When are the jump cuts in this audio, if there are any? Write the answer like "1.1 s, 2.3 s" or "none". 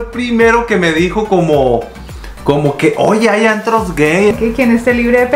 4.3 s